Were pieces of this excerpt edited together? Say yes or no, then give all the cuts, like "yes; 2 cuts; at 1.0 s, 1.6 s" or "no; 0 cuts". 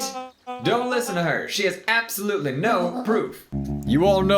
yes; 1 cut; at 3.4 s